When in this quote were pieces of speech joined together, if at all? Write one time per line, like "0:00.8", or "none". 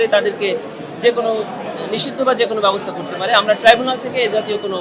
none